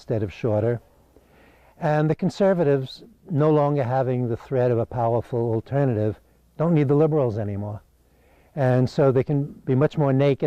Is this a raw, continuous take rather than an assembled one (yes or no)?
no